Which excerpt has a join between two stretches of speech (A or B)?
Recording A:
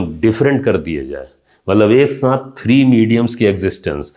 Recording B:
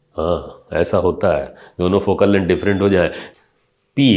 B